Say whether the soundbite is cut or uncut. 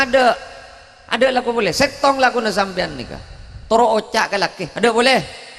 uncut